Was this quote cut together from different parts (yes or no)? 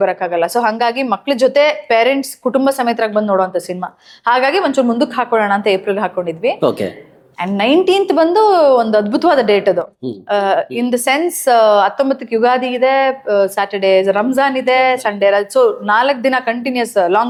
no